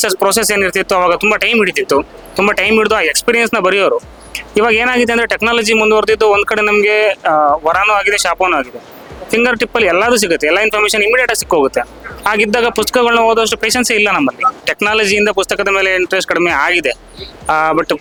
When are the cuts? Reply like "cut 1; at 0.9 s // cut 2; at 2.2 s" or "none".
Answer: none

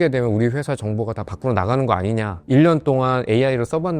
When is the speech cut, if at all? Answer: cut 1; at 2.4 s

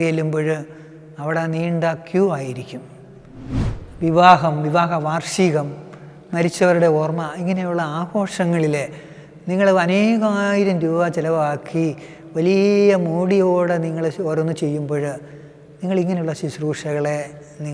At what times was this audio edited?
cut 1; at 3.4 s

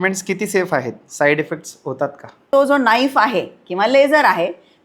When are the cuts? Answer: cut 1; at 2.5 s

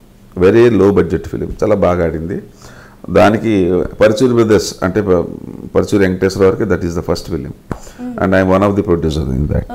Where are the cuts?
none

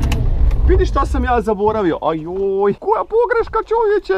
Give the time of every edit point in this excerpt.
cut 1; at 2.8 s

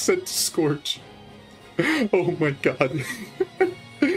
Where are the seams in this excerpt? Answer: none

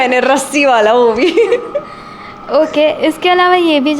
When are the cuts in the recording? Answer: none

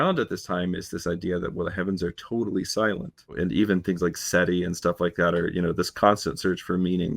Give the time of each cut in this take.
cut 1; at 3.3 s

